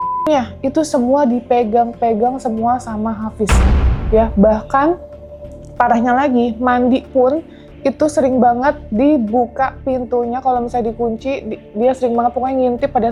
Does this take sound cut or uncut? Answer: uncut